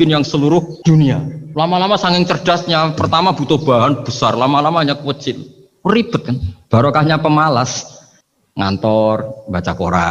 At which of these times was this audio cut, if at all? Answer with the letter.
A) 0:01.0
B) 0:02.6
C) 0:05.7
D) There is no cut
A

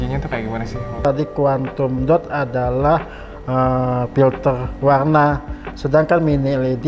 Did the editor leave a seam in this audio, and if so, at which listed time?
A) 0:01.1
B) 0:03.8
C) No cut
A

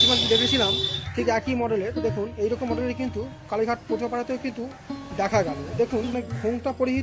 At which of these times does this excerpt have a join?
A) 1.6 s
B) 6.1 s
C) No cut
B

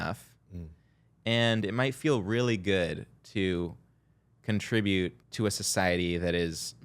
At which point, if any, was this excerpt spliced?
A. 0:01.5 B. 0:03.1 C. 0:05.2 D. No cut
C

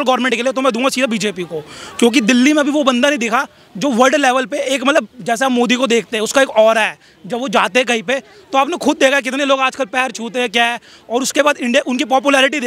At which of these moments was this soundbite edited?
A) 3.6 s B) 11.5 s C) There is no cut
C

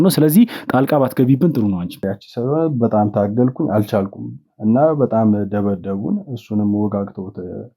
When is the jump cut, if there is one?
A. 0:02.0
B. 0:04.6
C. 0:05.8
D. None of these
A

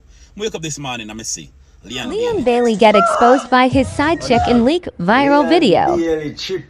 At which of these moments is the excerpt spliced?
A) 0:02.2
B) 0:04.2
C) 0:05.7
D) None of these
A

